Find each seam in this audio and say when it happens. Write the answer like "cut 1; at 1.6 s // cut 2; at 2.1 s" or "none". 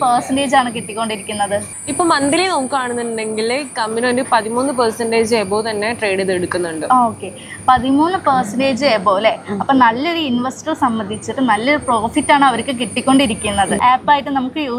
cut 1; at 13.8 s